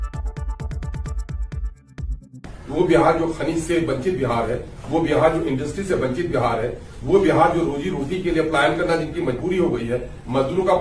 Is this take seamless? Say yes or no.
no